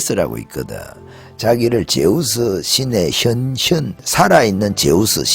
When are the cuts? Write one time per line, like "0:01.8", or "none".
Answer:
0:04.0